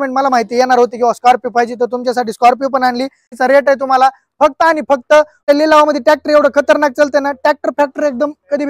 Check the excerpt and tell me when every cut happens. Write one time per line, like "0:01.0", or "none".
0:03.4
0:05.4